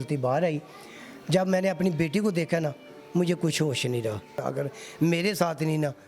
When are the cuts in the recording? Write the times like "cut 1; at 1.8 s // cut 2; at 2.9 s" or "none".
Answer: cut 1; at 4.4 s